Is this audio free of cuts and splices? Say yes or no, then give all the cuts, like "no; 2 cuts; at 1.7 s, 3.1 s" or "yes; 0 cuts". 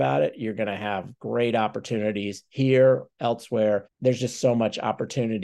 no; 1 cut; at 3.9 s